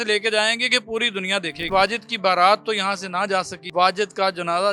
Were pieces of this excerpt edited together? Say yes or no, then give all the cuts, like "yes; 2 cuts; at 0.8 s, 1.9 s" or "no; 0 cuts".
yes; 2 cuts; at 1.7 s, 3.6 s